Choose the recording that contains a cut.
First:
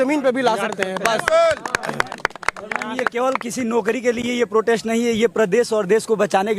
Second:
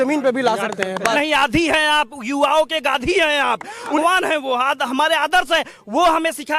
second; 2 cuts; at 1.1 s, 4.0 s

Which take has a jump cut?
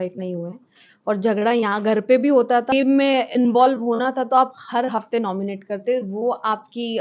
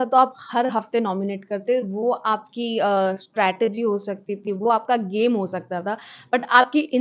first; 1 cut; at 2.7 s

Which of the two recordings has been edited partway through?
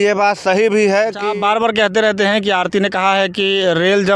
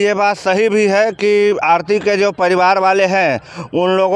first; 1 cut; at 1.2 s

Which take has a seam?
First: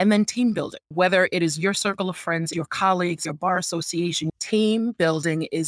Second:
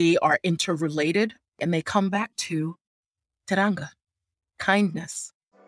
first; 3 cuts; at 0.8 s, 2.5 s, 3.2 s

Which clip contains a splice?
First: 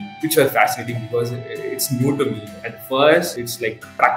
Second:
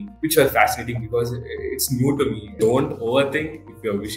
first; 1 cut; at 2.5 s

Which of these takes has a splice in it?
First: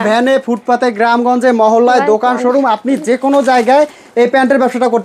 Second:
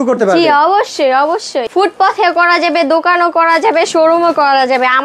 second; 1 cut; at 1.6 s

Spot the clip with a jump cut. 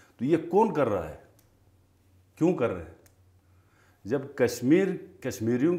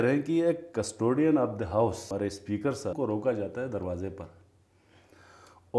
second; 2 cuts; at 2.1 s, 3.0 s

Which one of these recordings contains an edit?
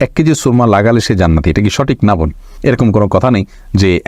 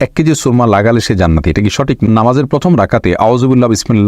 second; 1 cut; at 2.0 s

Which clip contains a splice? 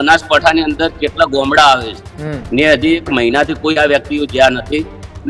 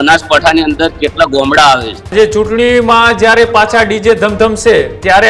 second; 1 cut; at 2.1 s

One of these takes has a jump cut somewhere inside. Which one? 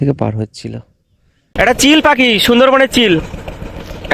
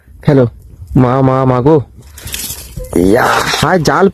first; 1 cut; at 1.4 s

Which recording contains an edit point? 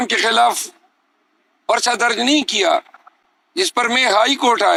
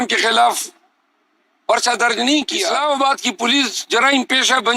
second; 1 cut; at 2.7 s

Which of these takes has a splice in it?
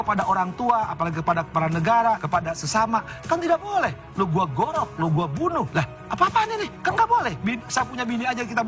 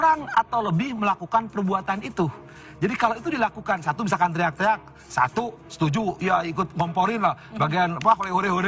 first; 3 cuts; at 2.2 s, 5.7 s, 6.7 s

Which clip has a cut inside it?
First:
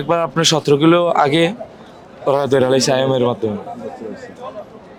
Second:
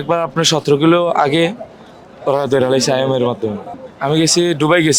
second; 1 cut; at 3.8 s

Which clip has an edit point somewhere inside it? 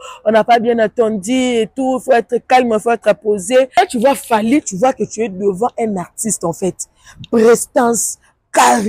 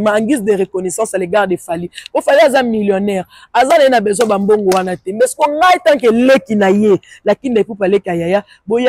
first; 1 cut; at 3.7 s

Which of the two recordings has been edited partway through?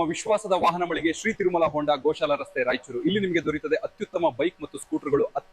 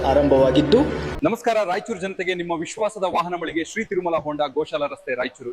second; 1 cut; at 1.1 s

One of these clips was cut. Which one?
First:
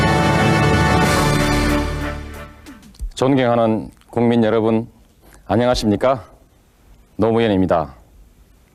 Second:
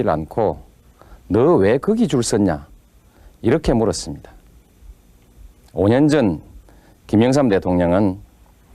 second; 1 cut; at 7.8 s

